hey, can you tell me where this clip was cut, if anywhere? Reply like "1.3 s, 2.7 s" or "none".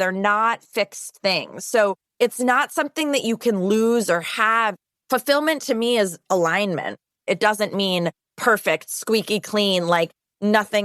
2.0 s, 7.2 s